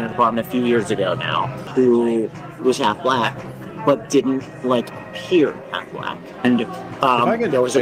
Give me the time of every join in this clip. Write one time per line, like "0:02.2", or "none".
0:01.6